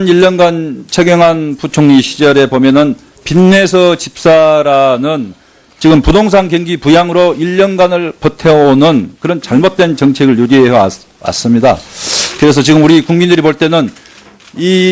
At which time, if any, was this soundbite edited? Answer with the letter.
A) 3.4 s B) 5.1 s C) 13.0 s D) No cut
A